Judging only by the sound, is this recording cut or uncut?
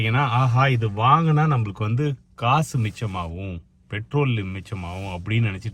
uncut